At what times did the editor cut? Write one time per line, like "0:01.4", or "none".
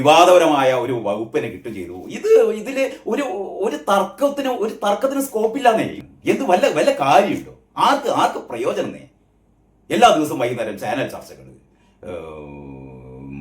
0:06.0